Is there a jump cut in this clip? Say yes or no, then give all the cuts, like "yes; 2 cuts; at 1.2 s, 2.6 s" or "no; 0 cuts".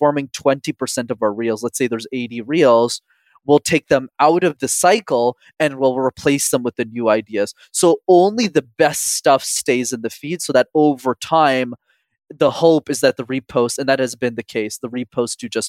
yes; 2 cuts; at 4.6 s, 12.2 s